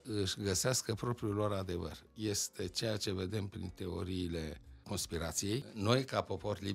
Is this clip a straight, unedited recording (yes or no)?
no